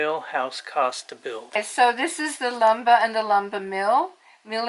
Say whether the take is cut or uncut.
cut